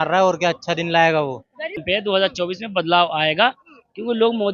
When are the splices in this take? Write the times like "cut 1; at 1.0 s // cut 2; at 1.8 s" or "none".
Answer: cut 1; at 1.8 s